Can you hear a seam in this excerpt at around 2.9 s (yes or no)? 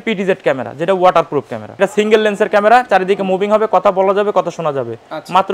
no